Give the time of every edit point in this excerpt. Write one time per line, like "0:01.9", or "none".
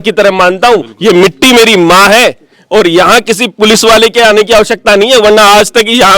none